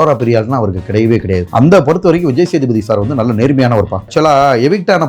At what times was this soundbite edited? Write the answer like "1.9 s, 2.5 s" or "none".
1.5 s, 4.1 s

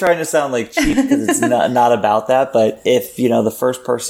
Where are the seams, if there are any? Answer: 2.8 s

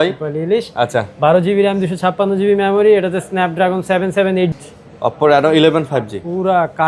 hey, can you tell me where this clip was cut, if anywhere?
4.6 s

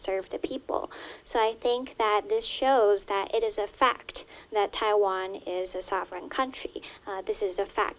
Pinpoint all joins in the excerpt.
none

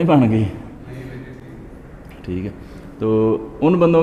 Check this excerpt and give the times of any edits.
none

